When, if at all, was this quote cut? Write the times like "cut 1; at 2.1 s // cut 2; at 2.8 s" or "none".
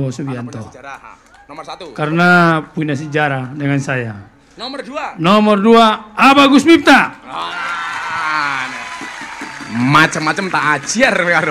none